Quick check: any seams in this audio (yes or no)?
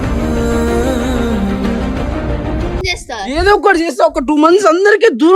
yes